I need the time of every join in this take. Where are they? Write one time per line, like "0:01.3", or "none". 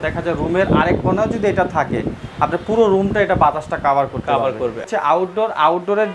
0:04.9